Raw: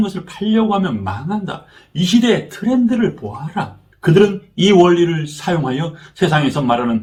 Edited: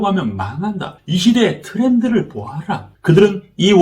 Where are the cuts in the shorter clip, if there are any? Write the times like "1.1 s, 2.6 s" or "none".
0.9 s, 2.8 s

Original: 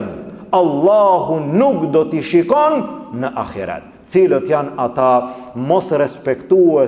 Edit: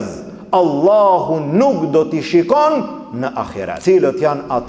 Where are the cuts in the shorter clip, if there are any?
3.6 s

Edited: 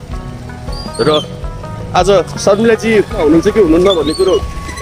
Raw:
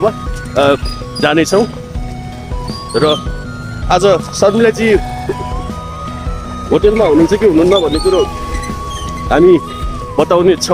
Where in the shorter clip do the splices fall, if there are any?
3.2 s

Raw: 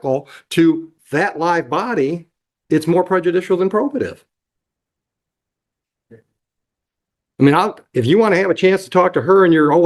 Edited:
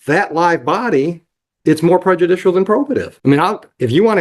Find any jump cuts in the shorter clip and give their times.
3.1 s

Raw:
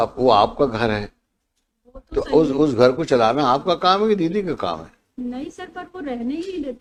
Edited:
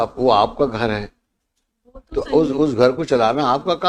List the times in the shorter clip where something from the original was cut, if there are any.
none

